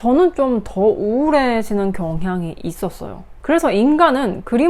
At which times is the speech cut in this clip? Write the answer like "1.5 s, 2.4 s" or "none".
3.2 s